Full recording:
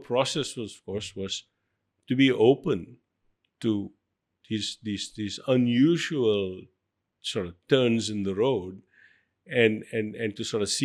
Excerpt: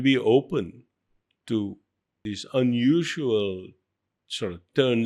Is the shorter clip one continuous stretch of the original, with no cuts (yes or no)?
no